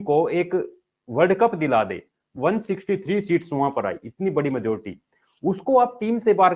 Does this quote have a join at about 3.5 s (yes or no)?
no